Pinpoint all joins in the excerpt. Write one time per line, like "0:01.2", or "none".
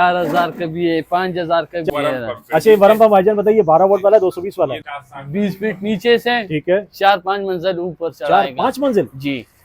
0:01.9
0:04.8

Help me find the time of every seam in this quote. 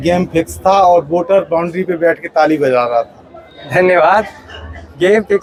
none

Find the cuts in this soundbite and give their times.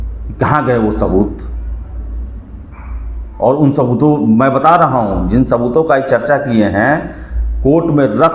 none

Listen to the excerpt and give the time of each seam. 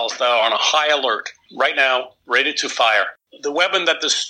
0:01.4
0:03.1

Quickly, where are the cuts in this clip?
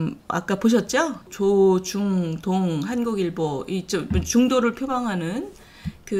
0:01.3

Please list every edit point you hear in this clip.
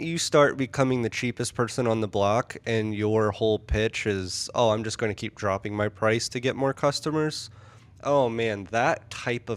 none

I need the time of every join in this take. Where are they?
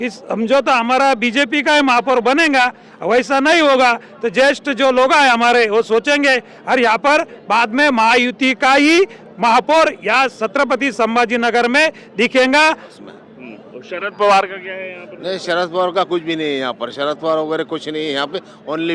0:12.8

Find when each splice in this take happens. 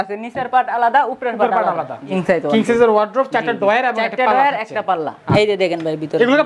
0:02.1
0:05.2

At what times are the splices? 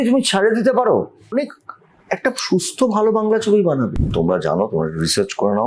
0:01.3
0:04.0

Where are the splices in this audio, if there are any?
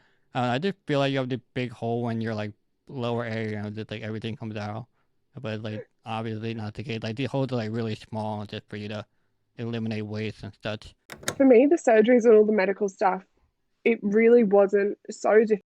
0:11.2

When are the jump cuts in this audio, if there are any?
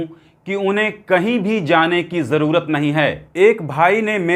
0:03.3

